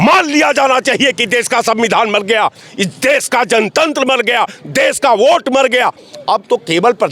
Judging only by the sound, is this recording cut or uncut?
uncut